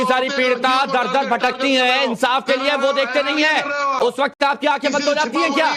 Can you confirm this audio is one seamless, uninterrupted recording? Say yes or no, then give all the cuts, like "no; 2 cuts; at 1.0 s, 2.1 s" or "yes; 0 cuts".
yes; 0 cuts